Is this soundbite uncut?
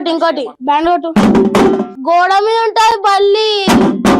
no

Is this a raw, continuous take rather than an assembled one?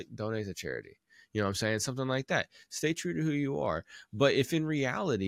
yes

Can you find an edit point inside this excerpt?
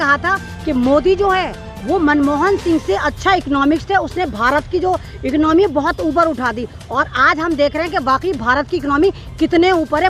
no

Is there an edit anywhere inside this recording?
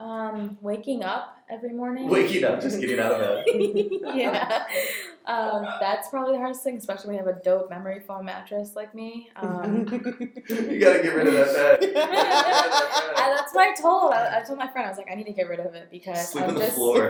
no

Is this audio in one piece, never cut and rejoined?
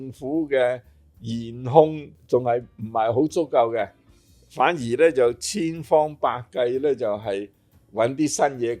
no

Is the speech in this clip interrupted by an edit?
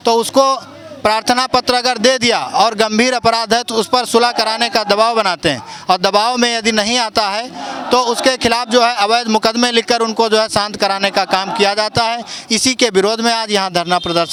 no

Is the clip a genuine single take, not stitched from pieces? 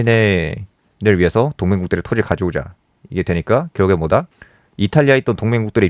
yes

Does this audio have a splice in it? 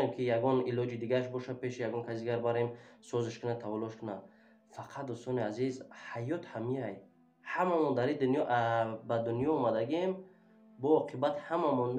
no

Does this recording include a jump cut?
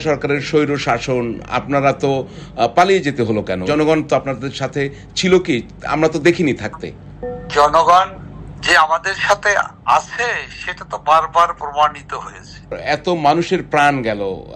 yes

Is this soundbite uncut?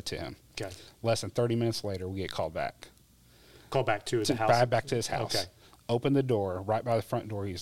yes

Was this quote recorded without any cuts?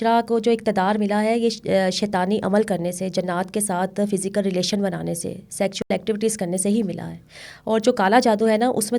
yes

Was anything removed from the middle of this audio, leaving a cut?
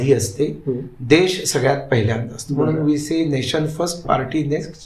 no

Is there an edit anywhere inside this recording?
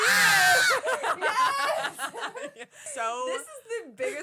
yes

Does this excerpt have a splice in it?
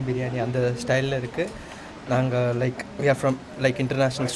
no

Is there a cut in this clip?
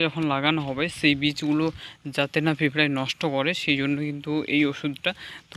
no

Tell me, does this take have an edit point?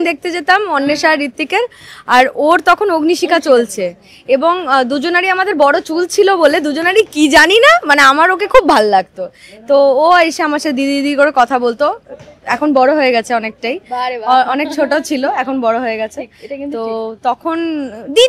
no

